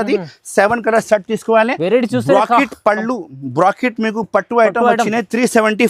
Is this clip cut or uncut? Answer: uncut